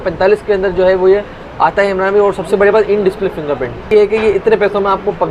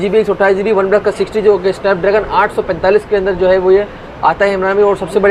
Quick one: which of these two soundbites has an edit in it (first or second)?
first